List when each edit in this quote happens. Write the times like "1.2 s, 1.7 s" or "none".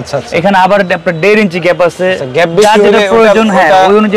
none